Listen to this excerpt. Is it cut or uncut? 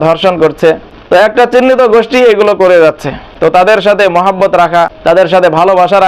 cut